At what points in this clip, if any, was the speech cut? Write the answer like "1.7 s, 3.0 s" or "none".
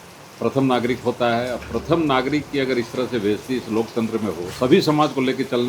4.4 s